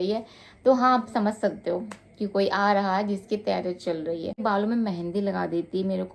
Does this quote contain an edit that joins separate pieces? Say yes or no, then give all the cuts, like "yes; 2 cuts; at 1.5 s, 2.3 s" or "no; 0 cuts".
yes; 1 cut; at 4.4 s